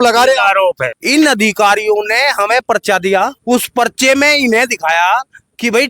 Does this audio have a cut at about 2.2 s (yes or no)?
no